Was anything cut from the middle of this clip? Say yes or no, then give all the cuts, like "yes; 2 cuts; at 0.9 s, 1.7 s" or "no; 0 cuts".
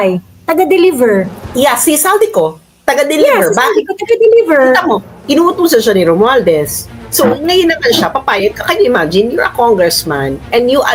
no; 0 cuts